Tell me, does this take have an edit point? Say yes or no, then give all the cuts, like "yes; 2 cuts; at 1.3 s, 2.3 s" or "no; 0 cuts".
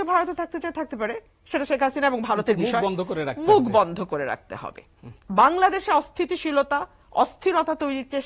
no; 0 cuts